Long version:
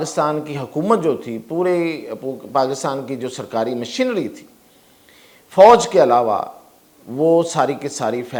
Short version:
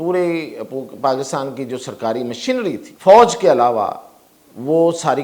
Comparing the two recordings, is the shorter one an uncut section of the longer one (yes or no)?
no